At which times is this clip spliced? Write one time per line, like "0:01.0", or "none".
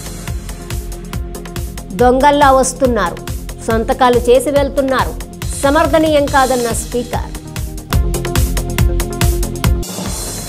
0:01.3